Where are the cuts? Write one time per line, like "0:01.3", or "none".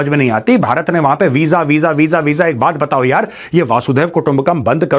none

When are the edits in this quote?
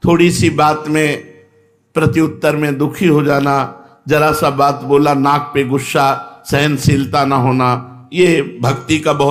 none

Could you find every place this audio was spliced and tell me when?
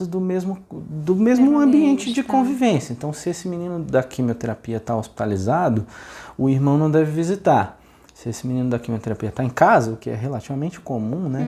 none

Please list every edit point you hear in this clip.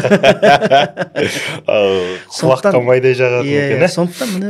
none

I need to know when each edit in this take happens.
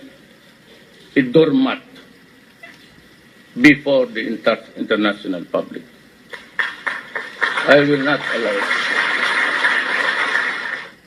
0:02.2

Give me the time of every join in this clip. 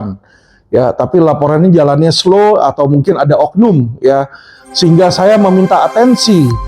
none

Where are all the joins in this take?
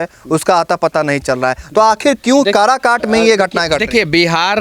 none

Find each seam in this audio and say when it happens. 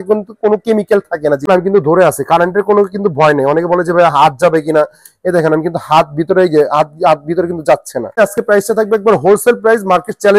0:01.5
0:08.2

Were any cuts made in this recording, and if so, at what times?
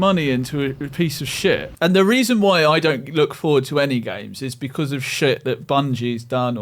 0:01.8

